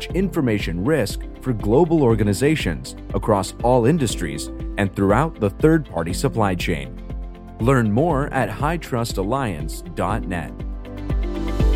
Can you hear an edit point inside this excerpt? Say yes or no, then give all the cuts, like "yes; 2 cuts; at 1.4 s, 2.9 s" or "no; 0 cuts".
yes; 1 cut; at 10.8 s